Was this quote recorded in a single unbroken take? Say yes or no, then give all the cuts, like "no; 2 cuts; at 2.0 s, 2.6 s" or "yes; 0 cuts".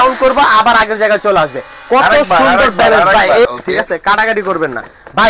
no; 1 cut; at 3.5 s